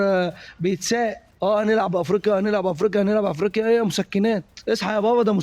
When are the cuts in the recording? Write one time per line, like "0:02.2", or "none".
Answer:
0:01.2
0:04.5